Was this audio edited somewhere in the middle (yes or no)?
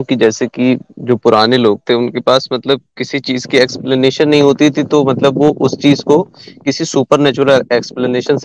no